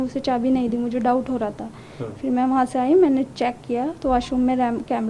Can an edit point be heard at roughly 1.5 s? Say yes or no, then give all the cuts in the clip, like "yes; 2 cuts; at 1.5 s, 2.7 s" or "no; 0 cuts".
no; 0 cuts